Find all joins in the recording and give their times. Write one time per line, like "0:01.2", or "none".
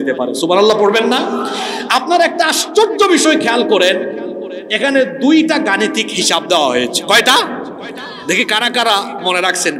none